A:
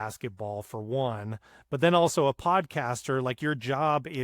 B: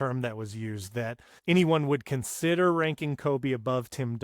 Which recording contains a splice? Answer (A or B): B